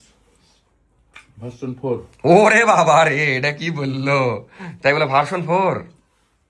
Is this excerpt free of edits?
yes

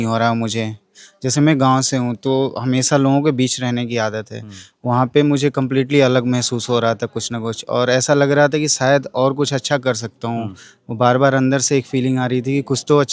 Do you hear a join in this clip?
no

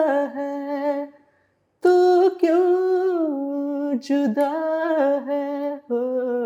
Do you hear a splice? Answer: no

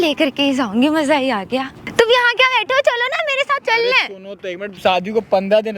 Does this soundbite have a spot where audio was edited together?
yes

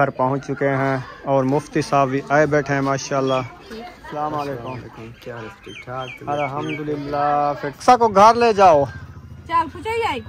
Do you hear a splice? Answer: yes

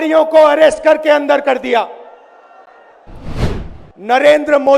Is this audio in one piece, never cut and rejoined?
no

